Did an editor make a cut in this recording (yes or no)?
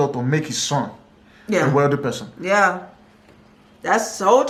no